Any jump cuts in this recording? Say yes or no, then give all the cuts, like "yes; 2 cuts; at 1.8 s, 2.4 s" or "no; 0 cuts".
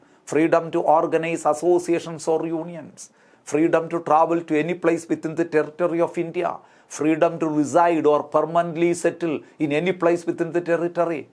no; 0 cuts